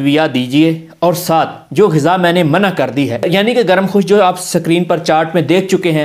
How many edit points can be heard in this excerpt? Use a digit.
0